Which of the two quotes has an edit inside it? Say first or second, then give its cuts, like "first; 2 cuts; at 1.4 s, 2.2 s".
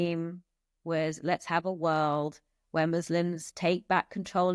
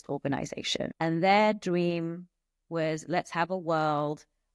second; 1 cut; at 0.9 s